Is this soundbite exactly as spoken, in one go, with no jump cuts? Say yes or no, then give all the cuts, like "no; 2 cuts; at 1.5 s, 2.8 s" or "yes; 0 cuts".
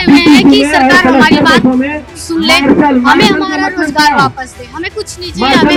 yes; 0 cuts